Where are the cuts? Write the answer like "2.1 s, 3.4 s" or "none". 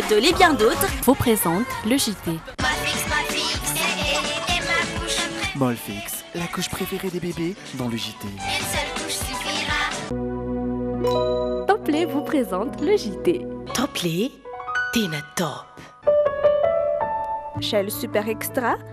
15.9 s

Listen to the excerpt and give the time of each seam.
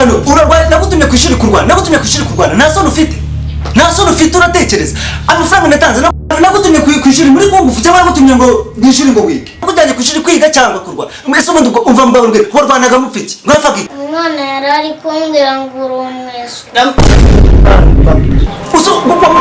none

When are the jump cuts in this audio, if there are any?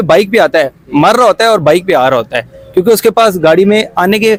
none

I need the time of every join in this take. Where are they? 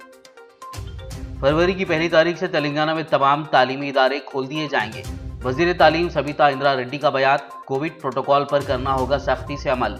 1.2 s

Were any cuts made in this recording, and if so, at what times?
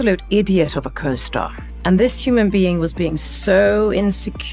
1.1 s

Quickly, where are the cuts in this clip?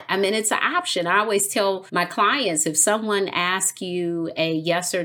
1.8 s

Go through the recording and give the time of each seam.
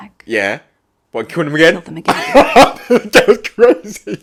none

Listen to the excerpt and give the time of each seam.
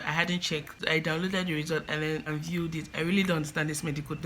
0.8 s, 2.3 s

